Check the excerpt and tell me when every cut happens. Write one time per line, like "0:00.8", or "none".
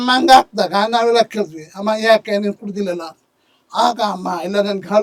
none